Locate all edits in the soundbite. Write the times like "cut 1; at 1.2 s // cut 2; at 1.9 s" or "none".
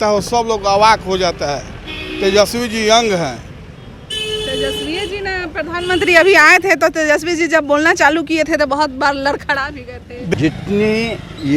cut 1; at 10.3 s